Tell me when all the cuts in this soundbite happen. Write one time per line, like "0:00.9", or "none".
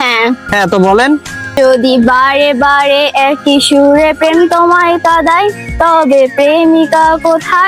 0:01.6